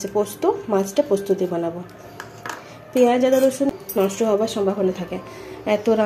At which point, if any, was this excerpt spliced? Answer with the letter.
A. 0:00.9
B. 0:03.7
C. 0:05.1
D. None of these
B